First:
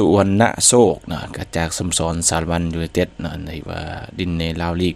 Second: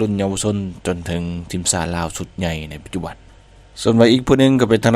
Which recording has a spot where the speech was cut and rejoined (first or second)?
second